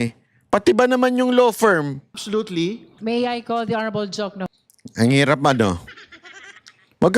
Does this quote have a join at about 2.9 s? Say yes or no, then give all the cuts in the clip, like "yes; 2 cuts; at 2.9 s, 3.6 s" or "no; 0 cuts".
yes; 1 cut; at 2.9 s